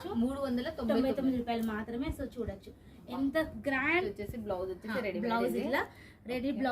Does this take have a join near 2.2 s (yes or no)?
no